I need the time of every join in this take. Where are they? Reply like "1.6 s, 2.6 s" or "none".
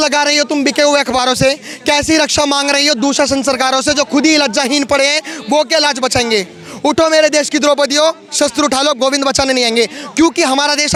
none